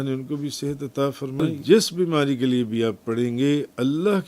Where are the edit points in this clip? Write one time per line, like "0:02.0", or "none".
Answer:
0:01.5